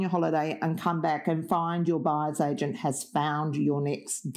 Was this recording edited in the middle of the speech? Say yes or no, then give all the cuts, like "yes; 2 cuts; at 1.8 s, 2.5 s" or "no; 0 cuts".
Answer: no; 0 cuts